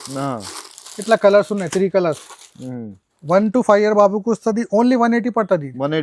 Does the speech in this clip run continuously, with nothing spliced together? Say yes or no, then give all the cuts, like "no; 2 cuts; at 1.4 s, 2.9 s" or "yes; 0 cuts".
yes; 0 cuts